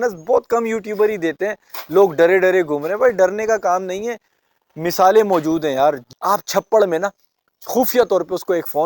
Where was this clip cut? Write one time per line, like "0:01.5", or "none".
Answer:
0:06.0